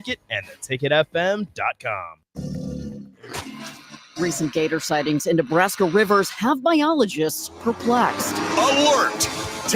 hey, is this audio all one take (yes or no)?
no